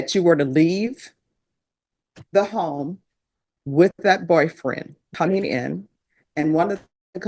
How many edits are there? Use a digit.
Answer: 1